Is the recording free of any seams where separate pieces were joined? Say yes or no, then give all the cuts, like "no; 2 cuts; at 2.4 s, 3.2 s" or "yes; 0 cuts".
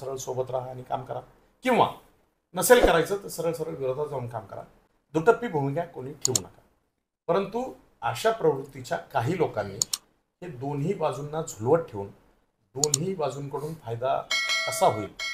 yes; 0 cuts